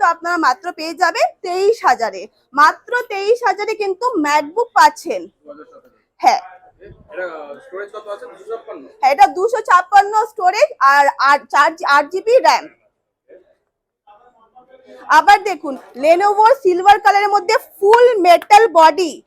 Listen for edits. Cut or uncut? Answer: uncut